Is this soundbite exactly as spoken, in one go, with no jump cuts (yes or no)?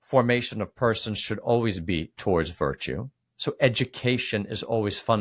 yes